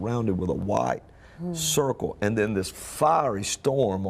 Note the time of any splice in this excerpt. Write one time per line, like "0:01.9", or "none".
0:02.5